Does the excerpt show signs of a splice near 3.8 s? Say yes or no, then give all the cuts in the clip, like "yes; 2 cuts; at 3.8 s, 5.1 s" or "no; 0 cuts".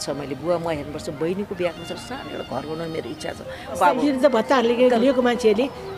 yes; 1 cut; at 3.8 s